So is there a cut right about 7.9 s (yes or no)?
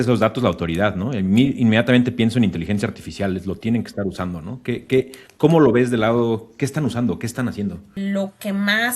yes